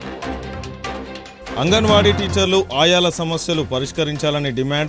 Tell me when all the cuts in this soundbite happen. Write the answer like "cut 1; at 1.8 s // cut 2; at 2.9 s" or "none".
cut 1; at 0.9 s

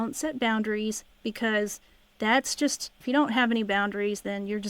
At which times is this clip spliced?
cut 1; at 1.1 s

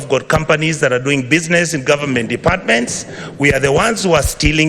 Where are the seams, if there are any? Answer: none

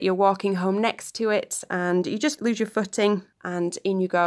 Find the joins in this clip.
cut 1; at 2.4 s // cut 2; at 3.4 s

